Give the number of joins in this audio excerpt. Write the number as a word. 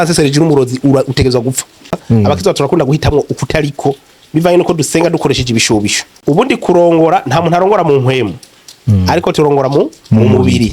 two